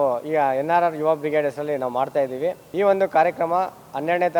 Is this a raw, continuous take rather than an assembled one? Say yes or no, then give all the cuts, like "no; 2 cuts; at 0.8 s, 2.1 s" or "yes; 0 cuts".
no; 1 cut; at 2.6 s